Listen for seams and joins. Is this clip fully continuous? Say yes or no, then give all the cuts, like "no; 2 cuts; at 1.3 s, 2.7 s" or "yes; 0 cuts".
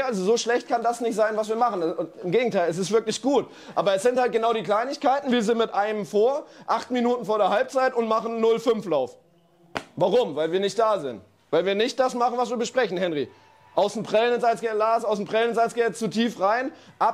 yes; 0 cuts